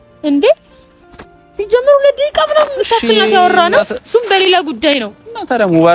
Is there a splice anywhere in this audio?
no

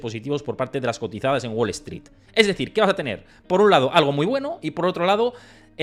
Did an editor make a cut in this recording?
no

